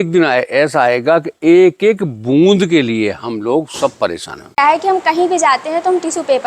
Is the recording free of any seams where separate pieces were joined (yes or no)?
no